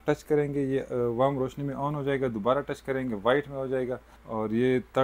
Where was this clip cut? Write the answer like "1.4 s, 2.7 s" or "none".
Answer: none